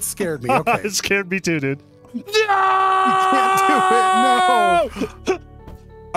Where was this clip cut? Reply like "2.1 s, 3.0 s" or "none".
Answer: 2.2 s